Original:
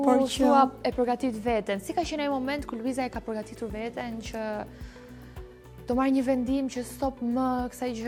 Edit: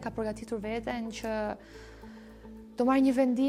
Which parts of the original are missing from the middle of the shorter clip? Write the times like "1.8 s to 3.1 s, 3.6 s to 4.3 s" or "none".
none